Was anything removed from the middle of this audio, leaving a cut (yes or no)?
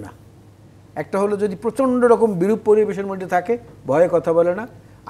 no